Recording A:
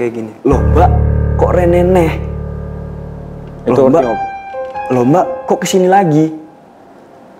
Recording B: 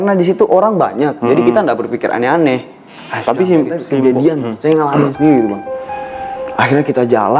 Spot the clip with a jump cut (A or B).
B